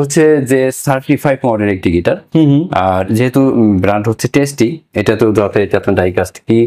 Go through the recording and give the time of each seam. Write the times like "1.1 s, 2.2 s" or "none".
none